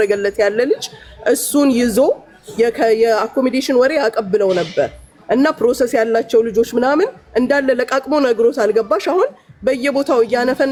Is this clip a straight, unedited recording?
yes; 0 cuts

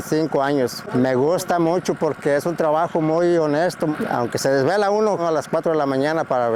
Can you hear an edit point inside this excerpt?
no; 0 cuts

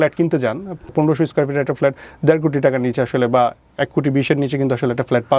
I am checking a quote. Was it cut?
yes; 1 cut; at 0.9 s

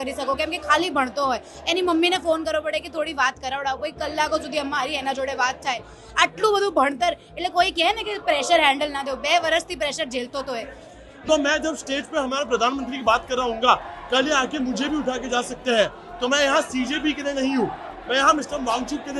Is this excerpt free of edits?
no; 1 cut; at 11.2 s

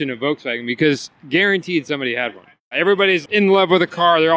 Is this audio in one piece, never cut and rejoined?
no; 1 cut; at 3.0 s

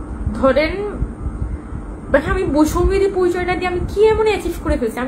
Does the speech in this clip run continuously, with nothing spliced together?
yes; 0 cuts

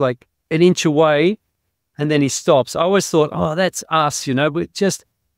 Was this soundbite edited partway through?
no; 0 cuts

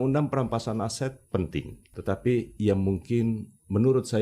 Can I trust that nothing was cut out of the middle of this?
no; 1 cut; at 1.8 s

